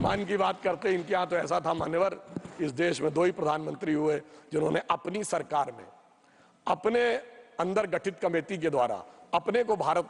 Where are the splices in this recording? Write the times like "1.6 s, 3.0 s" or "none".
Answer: none